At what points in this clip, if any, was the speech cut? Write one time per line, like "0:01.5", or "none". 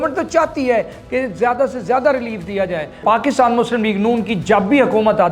0:03.0